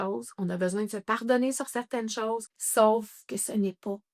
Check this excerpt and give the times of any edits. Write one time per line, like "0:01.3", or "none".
0:02.5

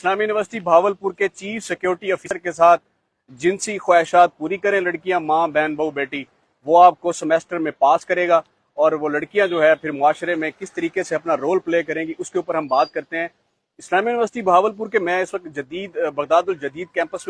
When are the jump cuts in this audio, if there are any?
0:02.3

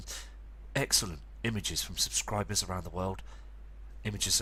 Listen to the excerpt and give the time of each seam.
none

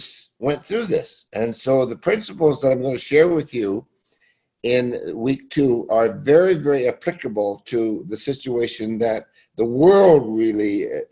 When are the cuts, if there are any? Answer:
none

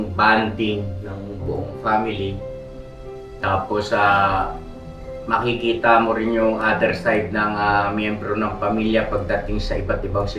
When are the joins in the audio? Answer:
none

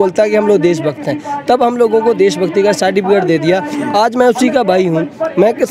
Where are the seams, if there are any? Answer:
none

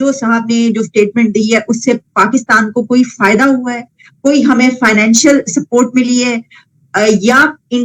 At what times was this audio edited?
none

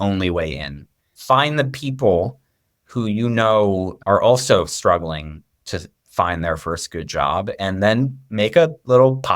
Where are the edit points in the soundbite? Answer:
0:01.1

